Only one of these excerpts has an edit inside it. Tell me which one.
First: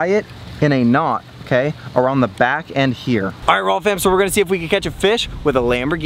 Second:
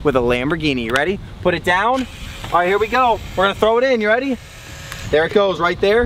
first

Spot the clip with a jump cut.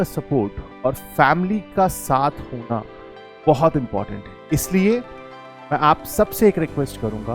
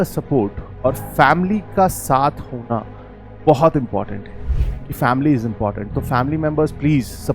second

